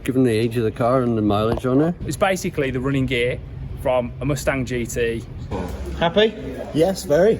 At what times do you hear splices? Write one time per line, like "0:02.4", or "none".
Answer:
0:02.0
0:05.5